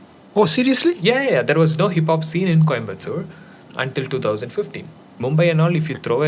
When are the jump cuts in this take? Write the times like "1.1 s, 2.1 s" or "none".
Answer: 5.0 s